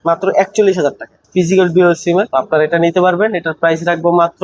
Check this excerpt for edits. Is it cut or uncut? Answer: cut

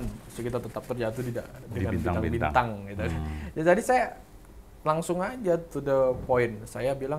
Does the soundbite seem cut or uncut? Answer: uncut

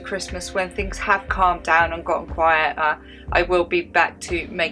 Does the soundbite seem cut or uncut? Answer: uncut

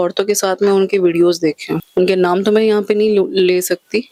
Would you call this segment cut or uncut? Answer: uncut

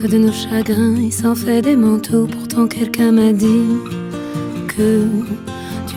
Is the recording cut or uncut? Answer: uncut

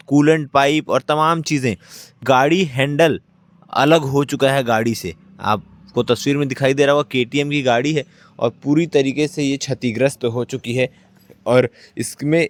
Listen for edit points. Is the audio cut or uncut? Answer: uncut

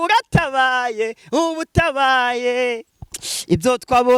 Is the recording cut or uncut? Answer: uncut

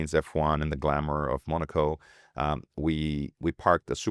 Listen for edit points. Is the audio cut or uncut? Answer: uncut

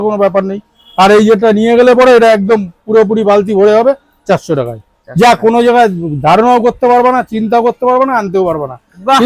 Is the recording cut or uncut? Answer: uncut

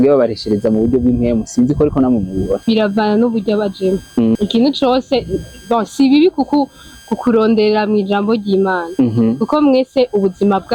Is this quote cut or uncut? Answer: cut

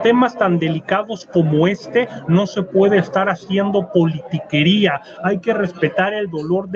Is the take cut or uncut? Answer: uncut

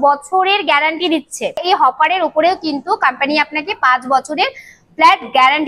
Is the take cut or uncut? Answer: cut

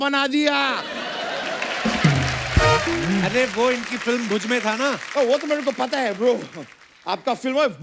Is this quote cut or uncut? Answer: uncut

